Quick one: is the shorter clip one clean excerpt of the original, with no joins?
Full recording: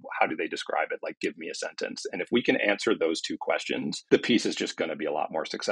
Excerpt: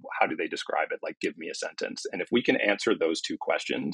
yes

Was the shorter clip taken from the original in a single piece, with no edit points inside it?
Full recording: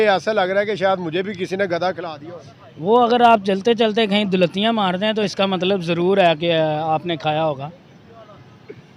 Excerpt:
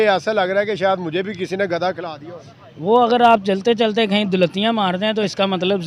yes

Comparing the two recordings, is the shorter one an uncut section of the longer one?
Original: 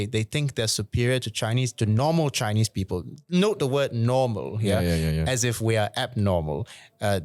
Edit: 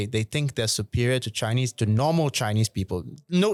yes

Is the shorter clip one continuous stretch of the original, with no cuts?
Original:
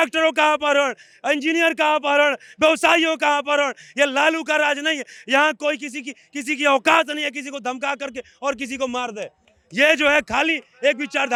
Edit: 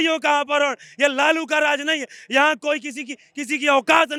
yes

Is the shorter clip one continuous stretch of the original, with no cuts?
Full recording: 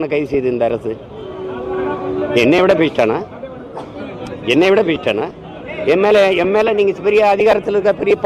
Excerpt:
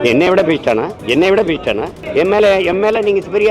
no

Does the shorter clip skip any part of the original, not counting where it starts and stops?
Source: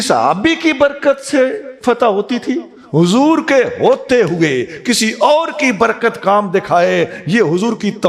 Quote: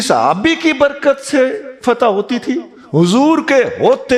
no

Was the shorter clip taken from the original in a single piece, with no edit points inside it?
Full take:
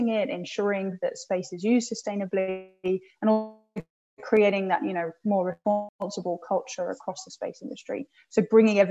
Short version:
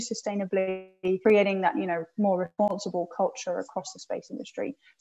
no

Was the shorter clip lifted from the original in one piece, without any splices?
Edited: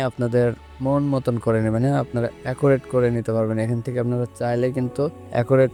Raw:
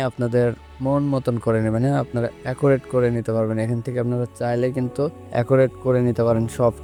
yes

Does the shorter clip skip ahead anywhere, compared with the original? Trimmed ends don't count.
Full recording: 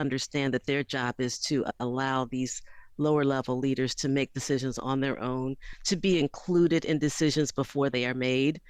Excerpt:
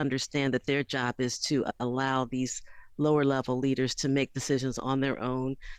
no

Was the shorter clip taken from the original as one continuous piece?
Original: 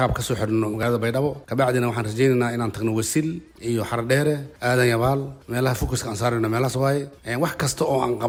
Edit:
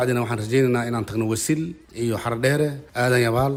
yes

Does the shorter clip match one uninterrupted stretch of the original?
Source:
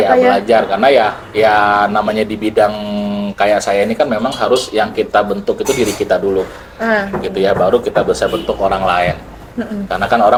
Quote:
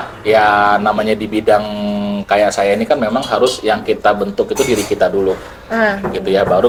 yes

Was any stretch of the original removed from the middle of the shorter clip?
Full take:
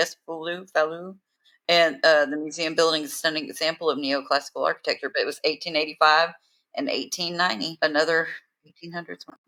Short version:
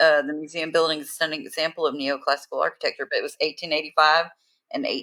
no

